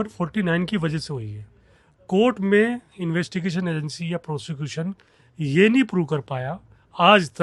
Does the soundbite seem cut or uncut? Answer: uncut